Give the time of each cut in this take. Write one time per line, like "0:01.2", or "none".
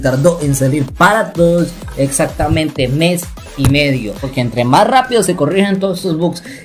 0:04.3